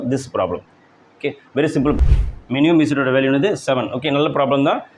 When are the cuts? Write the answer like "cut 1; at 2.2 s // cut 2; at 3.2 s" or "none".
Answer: cut 1; at 2.0 s